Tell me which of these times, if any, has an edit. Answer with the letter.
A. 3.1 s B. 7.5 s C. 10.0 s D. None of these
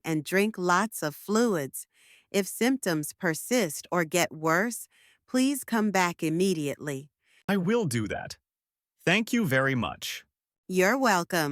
B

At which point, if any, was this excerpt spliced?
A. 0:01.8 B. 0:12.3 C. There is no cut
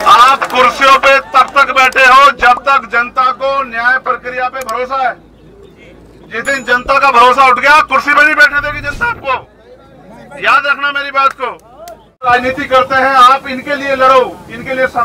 B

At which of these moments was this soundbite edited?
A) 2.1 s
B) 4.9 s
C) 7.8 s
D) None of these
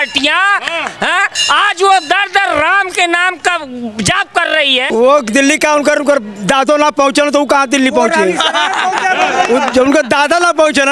B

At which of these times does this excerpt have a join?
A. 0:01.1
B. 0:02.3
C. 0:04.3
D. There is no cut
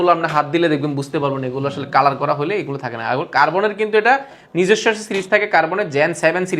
D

